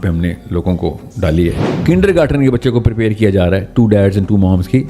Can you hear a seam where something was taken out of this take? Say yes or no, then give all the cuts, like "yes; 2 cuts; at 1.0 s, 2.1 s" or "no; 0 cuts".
yes; 1 cut; at 1.7 s